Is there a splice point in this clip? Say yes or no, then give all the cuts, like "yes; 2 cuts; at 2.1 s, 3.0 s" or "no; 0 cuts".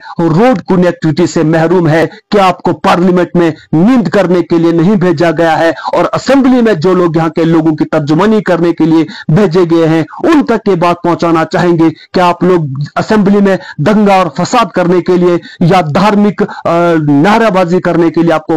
yes; 1 cut; at 2.1 s